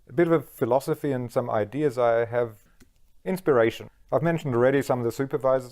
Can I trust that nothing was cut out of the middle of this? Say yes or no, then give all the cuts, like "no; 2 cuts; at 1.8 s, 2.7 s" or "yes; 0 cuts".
no; 2 cuts; at 2.6 s, 3.9 s